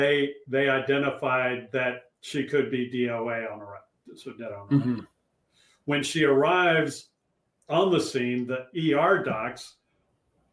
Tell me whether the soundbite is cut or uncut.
uncut